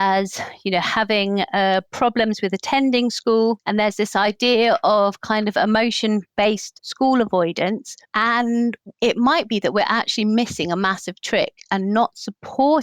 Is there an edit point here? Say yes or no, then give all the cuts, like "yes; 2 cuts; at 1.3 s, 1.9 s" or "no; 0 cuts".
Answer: yes; 1 cut; at 8.9 s